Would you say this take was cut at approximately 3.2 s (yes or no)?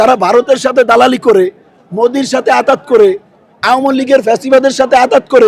no